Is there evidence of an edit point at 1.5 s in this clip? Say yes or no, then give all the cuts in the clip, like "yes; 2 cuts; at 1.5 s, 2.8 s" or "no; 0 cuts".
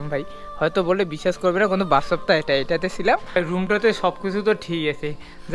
no; 1 cut; at 3.2 s